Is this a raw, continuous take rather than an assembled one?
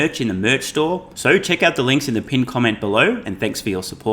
no; 1 cut; at 1.1 s

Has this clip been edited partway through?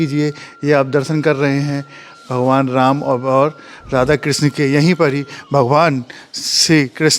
no; 0 cuts

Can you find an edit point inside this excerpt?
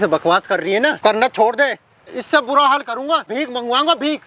yes; 3 cuts; at 1.0 s, 2.1 s, 3.3 s

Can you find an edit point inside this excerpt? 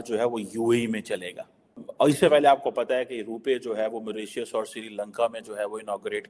yes; 1 cut; at 1.8 s

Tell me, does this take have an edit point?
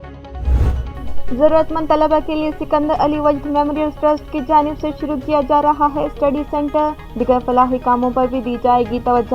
yes; 1 cut; at 0.9 s

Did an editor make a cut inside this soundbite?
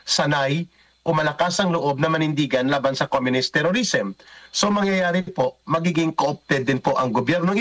no; 0 cuts

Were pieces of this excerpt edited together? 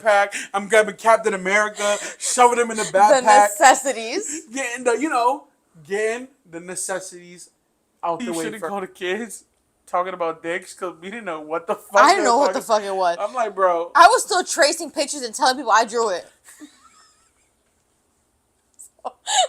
yes; 1 cut; at 8.6 s

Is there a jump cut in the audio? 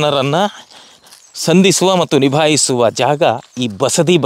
no; 0 cuts

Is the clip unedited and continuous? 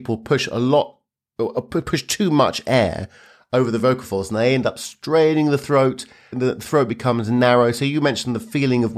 yes; 0 cuts

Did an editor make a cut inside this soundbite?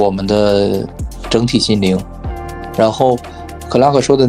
yes; 1 cut; at 1.0 s

